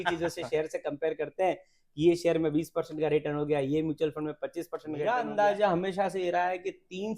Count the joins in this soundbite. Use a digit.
1